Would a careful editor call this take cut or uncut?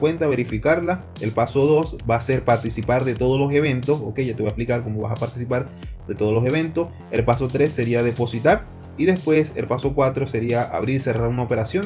uncut